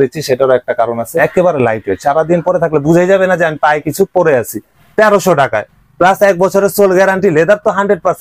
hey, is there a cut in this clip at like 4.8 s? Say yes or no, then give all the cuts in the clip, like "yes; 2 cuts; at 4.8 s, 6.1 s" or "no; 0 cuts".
yes; 2 cuts; at 1.2 s, 4.8 s